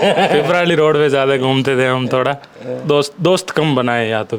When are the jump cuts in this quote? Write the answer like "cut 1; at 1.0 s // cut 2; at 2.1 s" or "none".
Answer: none